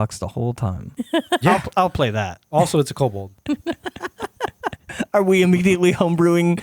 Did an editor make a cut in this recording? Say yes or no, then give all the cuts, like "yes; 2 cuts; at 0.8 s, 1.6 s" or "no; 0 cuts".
yes; 4 cuts; at 0.8 s, 2.4 s, 3.3 s, 4.8 s